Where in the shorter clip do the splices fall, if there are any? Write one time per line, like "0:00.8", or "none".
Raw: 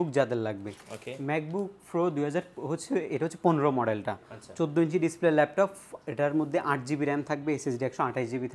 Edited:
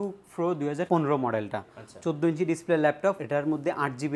0:00.9
0:03.2